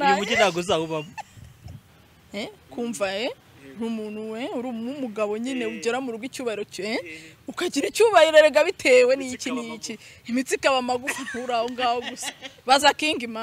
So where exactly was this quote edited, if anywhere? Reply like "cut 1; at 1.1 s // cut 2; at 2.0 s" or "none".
cut 1; at 1.9 s